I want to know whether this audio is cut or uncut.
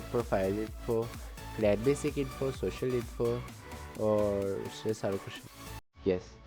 cut